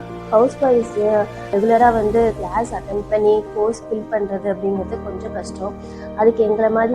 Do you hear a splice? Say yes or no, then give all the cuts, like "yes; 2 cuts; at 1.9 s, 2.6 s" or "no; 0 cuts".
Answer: yes; 1 cut; at 1.5 s